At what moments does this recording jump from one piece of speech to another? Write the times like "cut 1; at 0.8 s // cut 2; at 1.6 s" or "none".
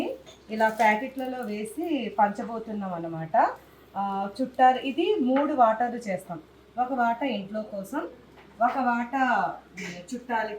none